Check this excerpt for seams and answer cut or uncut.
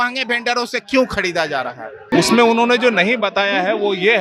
cut